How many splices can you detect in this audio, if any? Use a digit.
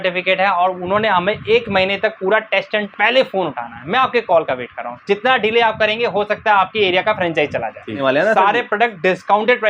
2